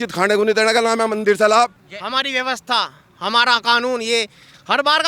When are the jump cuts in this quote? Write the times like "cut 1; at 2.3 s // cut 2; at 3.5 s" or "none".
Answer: cut 1; at 1.8 s